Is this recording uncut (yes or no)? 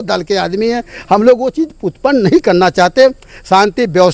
yes